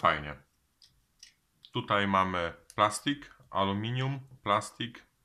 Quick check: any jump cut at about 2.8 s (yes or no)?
no